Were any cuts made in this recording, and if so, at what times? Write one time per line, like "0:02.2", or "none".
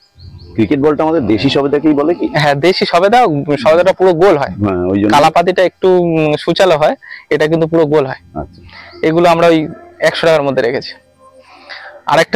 none